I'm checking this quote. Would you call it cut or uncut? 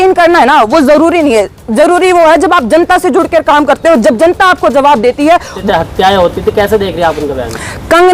cut